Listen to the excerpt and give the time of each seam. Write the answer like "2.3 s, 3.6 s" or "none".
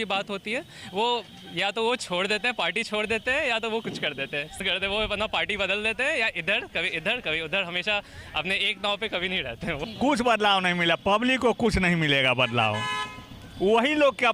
4.5 s, 9.9 s

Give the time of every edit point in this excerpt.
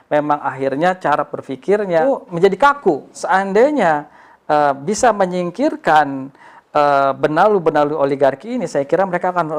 2.0 s, 3.2 s

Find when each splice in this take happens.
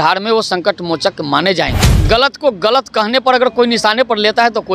1.9 s

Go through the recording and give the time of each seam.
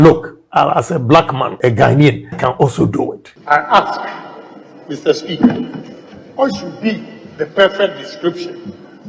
1.5 s, 2.4 s, 3.3 s

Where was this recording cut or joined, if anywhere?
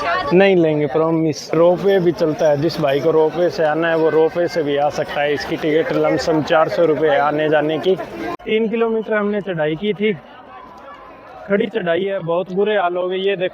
1.6 s, 8.4 s

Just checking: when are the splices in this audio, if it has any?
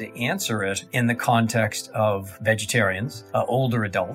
0.8 s, 2.3 s, 3.1 s

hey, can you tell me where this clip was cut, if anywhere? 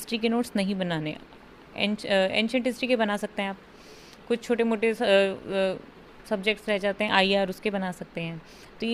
none

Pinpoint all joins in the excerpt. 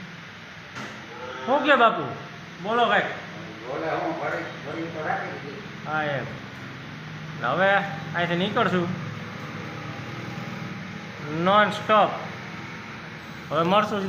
none

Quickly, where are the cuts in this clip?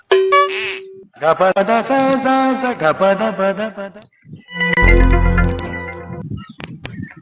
6.0 s

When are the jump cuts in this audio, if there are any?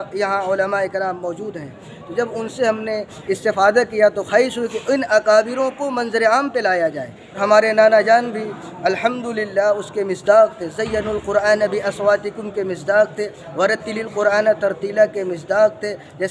7.4 s

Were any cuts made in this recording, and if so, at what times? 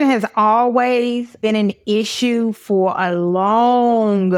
none

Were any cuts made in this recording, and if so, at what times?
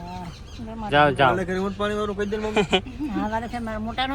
none

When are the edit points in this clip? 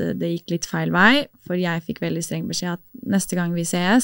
none

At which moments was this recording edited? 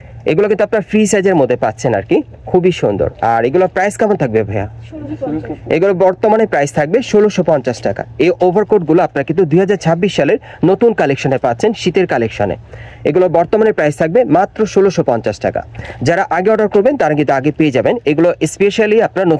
none

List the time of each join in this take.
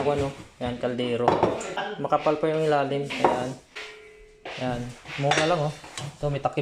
none

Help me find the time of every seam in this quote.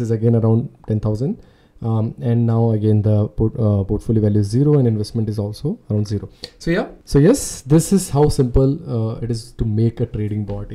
none

